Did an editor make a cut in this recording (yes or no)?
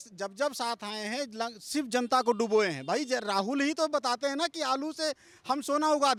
no